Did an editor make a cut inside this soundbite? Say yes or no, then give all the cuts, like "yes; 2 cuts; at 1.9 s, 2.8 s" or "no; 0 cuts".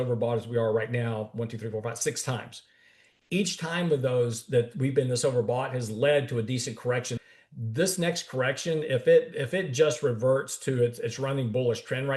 yes; 1 cut; at 7.2 s